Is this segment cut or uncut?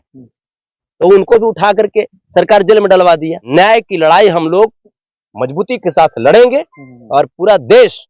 cut